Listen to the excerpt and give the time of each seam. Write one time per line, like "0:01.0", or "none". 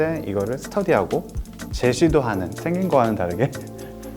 0:02.5